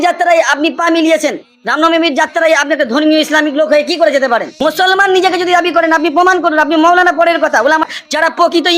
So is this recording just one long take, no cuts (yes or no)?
no